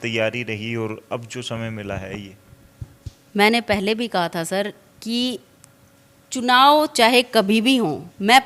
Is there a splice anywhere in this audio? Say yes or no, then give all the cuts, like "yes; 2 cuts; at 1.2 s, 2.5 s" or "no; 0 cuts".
no; 0 cuts